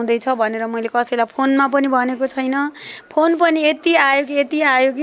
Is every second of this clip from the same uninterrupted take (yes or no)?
yes